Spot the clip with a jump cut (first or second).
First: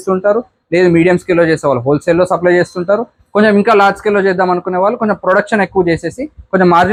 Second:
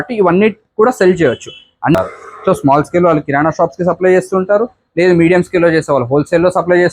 second